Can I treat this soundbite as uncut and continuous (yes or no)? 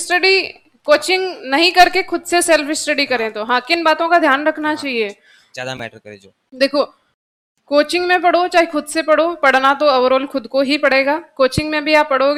yes